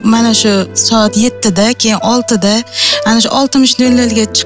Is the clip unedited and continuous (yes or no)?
yes